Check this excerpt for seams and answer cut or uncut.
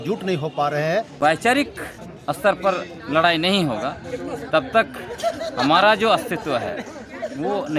cut